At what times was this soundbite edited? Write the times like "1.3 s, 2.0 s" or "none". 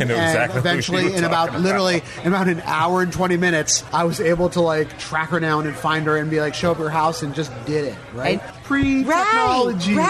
3.8 s, 8.5 s